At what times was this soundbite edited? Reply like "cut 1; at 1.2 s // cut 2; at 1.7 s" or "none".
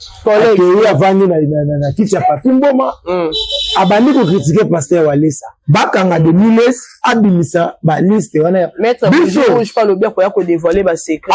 cut 1; at 5.6 s

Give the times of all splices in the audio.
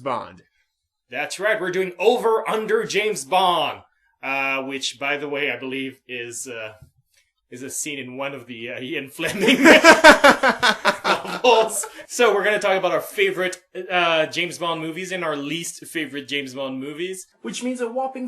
cut 1; at 15.2 s

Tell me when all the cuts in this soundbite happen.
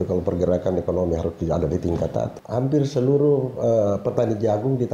cut 1; at 2.3 s

